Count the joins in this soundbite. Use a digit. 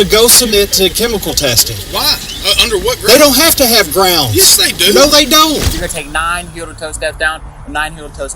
1